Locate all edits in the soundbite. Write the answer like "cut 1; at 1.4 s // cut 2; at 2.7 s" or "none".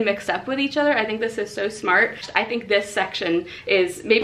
cut 1; at 2.2 s